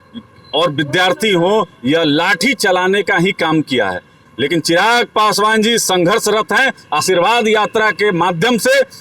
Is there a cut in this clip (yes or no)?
yes